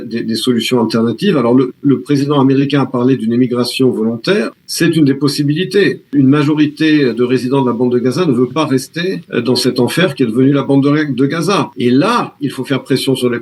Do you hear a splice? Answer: yes; 4 cuts; at 4.6 s, 6.1 s, 9.2 s, 11.7 s

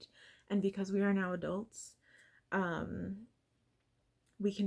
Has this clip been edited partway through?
no; 0 cuts

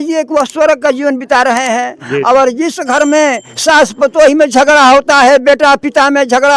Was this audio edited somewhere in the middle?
no; 0 cuts

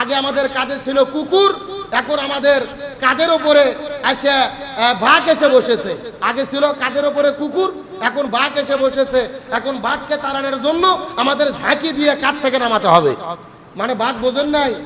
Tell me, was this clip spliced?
no; 0 cuts

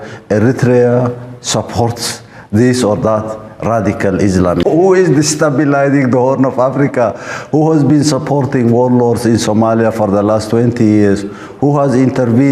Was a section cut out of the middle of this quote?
yes; 1 cut; at 4.6 s

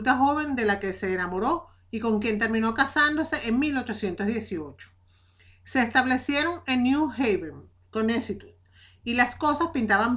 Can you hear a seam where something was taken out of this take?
no; 0 cuts

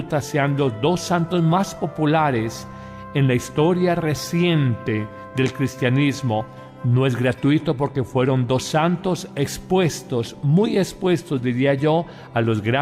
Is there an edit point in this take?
yes; 1 cut; at 5.3 s

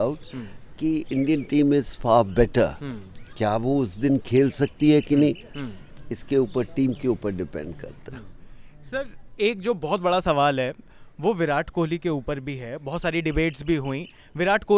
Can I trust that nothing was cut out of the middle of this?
yes; 0 cuts

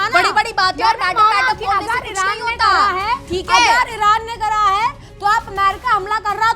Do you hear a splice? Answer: no; 0 cuts

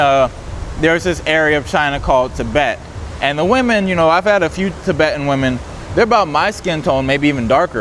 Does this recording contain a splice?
no; 0 cuts

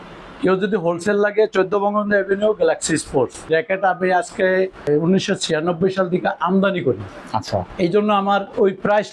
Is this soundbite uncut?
no; 3 cuts; at 3.5 s, 4.8 s, 7.1 s

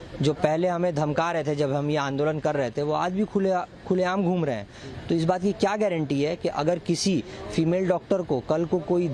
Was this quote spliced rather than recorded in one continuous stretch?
no; 0 cuts

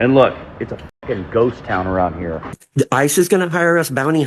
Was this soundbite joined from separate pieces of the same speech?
yes; 1 cut; at 2.5 s

